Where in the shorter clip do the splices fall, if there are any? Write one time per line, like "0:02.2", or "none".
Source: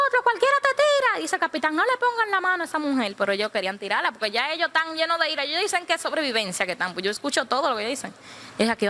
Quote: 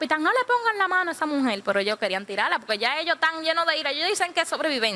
none